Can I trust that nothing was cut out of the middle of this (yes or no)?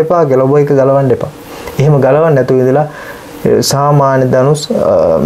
yes